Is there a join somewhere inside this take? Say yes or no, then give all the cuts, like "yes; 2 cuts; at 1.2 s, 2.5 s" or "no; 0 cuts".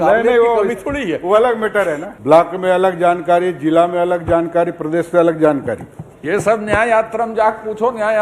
yes; 1 cut; at 2.1 s